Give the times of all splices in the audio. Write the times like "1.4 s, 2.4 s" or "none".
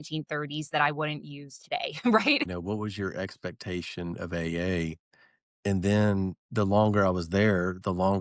2.5 s